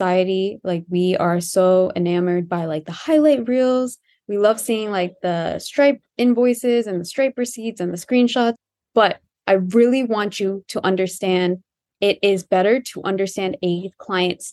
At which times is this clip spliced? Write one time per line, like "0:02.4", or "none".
none